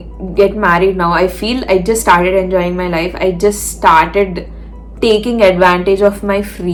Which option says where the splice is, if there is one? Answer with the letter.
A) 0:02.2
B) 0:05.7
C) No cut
C